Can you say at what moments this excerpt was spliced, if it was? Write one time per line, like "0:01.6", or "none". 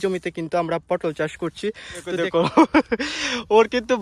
0:02.1